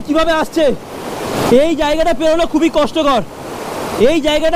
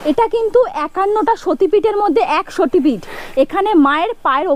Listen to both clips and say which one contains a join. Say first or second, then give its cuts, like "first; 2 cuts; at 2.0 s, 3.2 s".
first; 1 cut; at 1.3 s